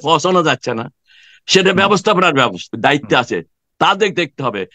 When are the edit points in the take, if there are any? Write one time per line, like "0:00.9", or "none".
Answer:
0:02.6